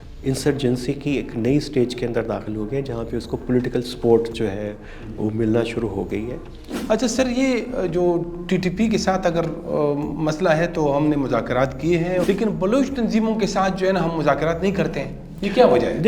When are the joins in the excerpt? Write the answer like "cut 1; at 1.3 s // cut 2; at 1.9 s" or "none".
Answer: cut 1; at 6.7 s // cut 2; at 12.2 s